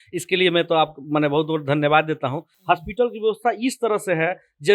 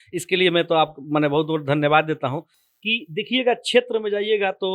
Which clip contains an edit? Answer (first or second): first